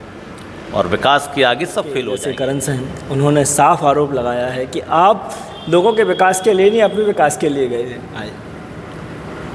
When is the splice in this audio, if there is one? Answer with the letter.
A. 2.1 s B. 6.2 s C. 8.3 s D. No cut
A